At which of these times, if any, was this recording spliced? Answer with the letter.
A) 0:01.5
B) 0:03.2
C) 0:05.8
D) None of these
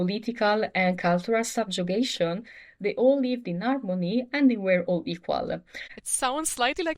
C